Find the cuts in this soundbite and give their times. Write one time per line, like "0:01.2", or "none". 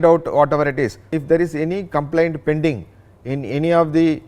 0:01.2